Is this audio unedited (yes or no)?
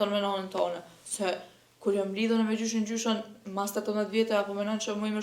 yes